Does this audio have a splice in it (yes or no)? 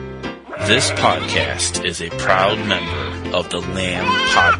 no